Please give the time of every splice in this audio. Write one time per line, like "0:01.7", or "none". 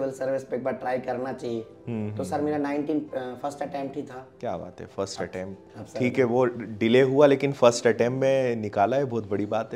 none